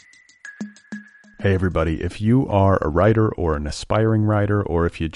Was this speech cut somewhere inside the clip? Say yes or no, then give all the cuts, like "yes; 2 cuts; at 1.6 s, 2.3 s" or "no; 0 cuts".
yes; 1 cut; at 0.9 s